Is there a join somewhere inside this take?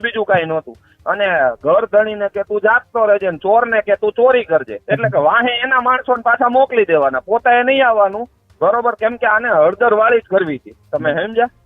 yes; 1 cut; at 4.8 s

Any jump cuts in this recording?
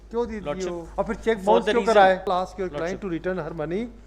yes; 2 cuts; at 0.8 s, 2.3 s

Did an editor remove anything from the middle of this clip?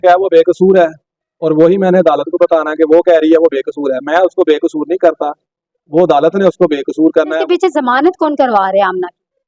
yes; 1 cut; at 7.4 s

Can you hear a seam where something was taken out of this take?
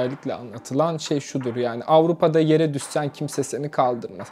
no; 0 cuts

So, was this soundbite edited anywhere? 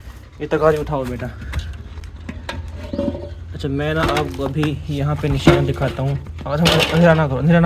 no; 0 cuts

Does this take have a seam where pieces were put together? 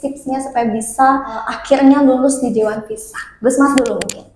yes; 1 cut; at 1.5 s

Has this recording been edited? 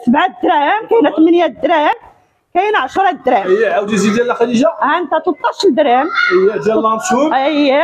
no; 0 cuts

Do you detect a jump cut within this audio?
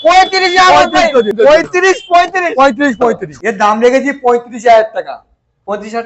yes; 2 cuts; at 1.3 s, 3.3 s

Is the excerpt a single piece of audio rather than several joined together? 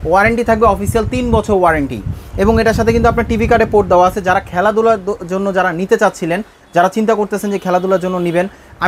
yes; 0 cuts

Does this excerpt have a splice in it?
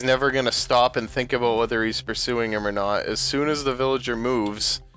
no; 0 cuts

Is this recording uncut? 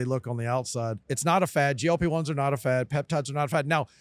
no; 1 cut; at 1.0 s

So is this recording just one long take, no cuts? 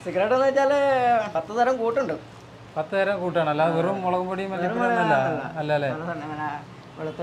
yes; 0 cuts

